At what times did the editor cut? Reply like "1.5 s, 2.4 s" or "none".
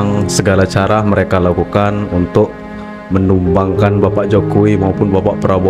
none